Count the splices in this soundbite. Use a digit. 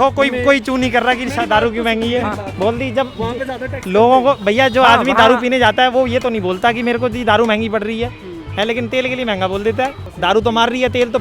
2